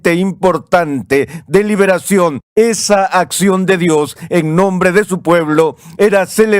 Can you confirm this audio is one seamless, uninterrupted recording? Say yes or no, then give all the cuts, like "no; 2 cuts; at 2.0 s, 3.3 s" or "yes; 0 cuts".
no; 1 cut; at 2.4 s